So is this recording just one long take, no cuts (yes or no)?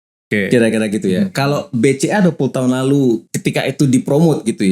no